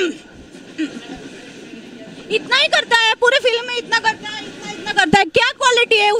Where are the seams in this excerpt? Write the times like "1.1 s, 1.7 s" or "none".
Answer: none